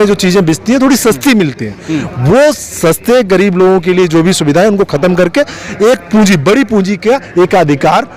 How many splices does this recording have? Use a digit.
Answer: 0